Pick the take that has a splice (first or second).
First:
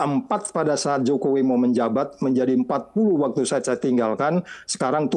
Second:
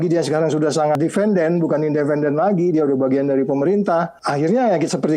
second